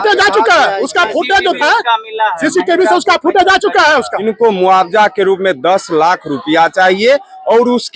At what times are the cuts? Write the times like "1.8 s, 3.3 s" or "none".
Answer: 4.1 s